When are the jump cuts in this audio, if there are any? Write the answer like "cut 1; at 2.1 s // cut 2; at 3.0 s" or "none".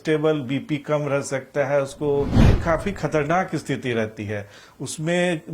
cut 1; at 2.6 s